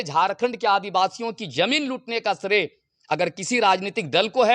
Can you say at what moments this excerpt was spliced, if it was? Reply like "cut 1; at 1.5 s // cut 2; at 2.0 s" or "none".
none